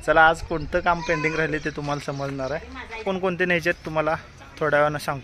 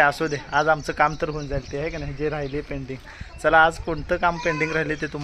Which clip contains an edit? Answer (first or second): first